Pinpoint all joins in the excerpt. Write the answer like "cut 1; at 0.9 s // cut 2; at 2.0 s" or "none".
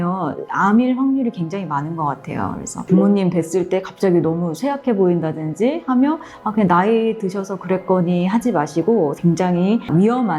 cut 1; at 9.2 s